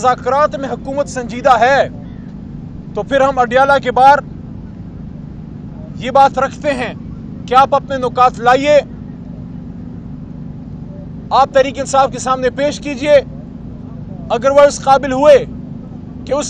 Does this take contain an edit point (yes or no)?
no